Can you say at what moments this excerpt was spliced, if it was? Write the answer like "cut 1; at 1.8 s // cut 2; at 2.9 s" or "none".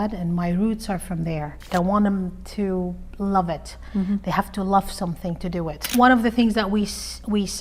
cut 1; at 1.7 s // cut 2; at 5.9 s